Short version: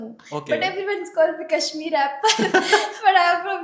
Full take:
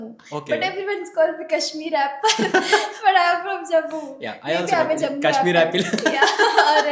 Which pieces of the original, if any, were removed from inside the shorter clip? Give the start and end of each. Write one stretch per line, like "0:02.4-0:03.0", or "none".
none